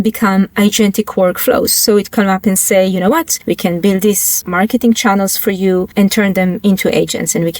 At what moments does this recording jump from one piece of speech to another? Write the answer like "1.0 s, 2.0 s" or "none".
3.3 s, 4.3 s, 5.9 s